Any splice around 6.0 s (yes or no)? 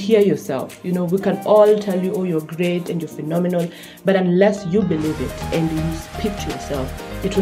no